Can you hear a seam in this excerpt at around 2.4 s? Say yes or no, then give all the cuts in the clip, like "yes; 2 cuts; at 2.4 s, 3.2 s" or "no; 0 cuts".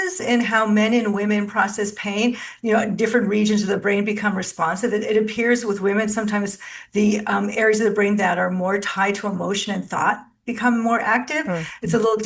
no; 0 cuts